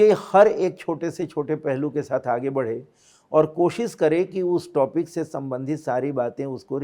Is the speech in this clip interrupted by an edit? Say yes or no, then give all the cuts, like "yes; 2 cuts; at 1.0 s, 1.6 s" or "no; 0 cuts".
no; 0 cuts